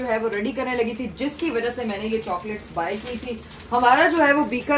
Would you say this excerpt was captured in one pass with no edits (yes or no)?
yes